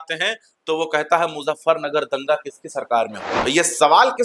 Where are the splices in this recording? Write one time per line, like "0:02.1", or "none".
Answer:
0:03.3